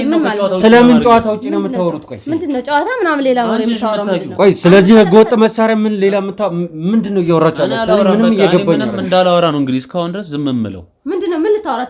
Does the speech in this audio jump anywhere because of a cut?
no; 0 cuts

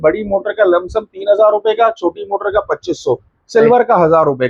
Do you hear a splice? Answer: no; 0 cuts

